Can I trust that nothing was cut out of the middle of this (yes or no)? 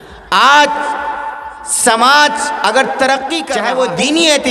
no